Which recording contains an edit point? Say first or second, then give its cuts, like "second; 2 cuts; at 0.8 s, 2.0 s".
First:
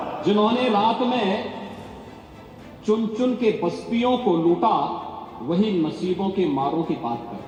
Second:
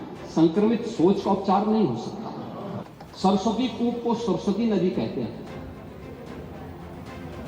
second; 1 cut; at 2.8 s